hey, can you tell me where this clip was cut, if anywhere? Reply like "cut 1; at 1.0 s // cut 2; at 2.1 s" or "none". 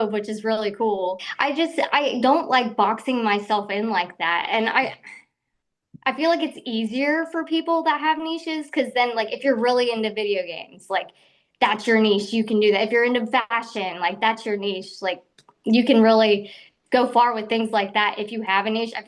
cut 1; at 1.3 s